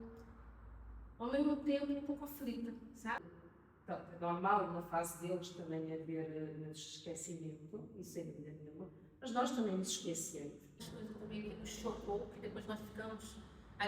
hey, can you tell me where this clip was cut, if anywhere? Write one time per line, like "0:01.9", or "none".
0:03.2
0:10.8